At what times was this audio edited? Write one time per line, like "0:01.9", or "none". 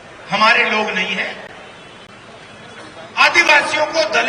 none